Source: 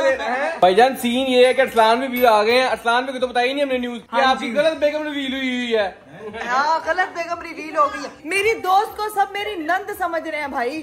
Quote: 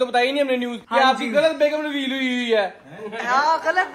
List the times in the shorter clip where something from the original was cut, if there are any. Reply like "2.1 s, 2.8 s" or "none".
none